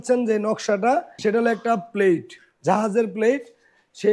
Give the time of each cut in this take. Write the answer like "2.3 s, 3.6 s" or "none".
1.1 s